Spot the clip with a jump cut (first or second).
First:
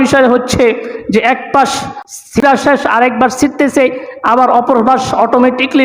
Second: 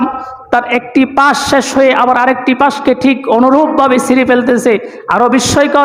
first